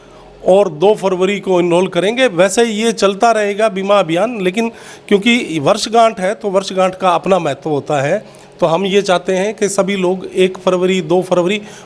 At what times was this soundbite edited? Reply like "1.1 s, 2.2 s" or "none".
none